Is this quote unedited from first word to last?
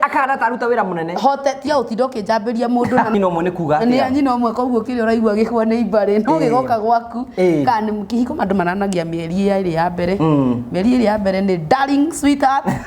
no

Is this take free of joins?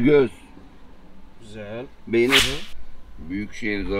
no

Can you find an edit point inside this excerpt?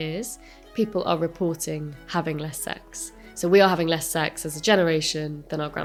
no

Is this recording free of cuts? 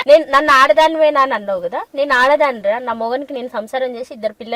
yes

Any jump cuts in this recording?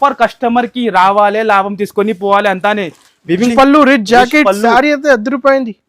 yes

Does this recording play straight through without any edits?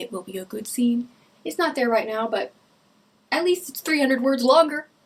yes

